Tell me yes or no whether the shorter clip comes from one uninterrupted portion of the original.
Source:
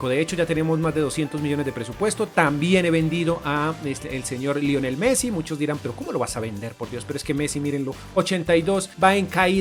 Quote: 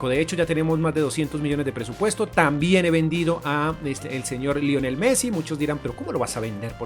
yes